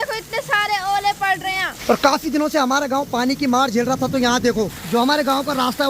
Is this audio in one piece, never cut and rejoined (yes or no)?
no